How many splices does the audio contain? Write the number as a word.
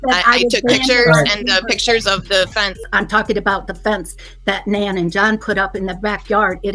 one